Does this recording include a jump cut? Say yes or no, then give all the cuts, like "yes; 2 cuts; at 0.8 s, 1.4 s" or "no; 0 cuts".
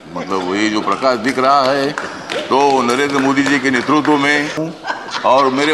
yes; 1 cut; at 4.7 s